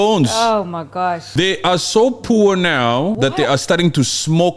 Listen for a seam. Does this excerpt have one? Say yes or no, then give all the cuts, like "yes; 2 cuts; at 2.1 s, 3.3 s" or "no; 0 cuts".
yes; 2 cuts; at 1.2 s, 3.2 s